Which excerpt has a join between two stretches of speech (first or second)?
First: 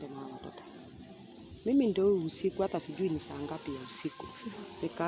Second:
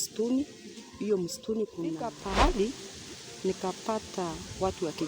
second